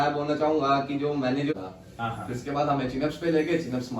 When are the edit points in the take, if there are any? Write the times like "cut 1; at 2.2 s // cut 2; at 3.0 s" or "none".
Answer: cut 1; at 1.5 s